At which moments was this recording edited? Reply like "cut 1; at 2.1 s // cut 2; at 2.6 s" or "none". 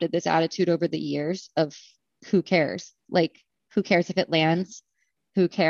none